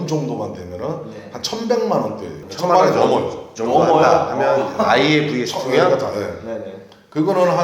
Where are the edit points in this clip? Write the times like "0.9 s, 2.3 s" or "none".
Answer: none